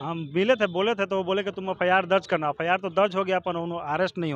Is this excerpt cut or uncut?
uncut